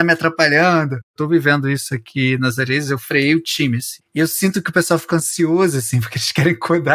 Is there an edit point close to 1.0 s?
yes; 2 cuts; at 1.0 s, 4.0 s

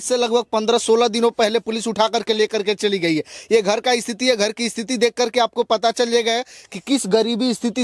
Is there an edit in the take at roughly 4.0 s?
no; 0 cuts

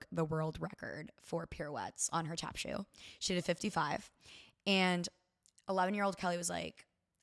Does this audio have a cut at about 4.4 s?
no; 0 cuts

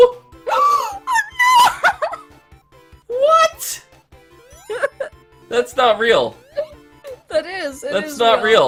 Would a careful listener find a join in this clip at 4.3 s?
no; 0 cuts

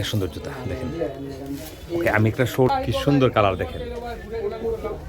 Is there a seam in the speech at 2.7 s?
yes; 1 cut; at 2.7 s

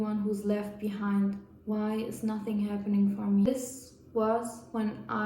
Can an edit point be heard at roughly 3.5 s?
yes; 1 cut; at 3.5 s

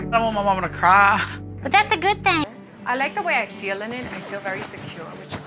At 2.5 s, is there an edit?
yes; 1 cut; at 2.5 s

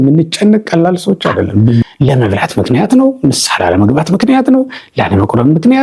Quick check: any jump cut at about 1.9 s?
yes; 1 cut; at 1.9 s

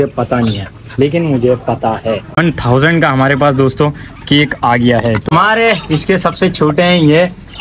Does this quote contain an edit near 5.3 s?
yes; 2 cuts; at 2.4 s, 5.3 s

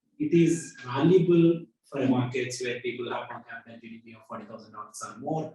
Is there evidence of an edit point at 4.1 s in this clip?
no; 1 cut; at 2.1 s

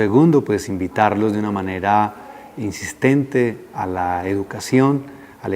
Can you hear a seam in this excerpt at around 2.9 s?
yes; 1 cut; at 2.9 s

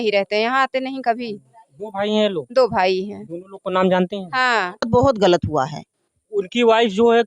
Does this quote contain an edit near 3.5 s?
no; 1 cut; at 4.9 s

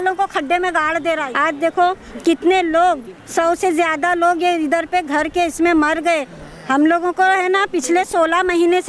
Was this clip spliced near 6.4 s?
yes; 2 cuts; at 1.3 s, 6.4 s

